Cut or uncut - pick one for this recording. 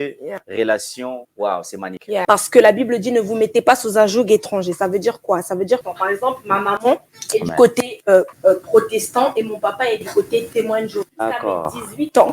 cut